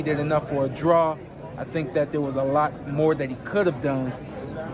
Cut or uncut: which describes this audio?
uncut